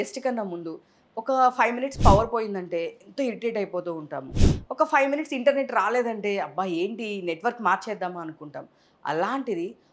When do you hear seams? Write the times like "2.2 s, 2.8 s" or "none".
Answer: none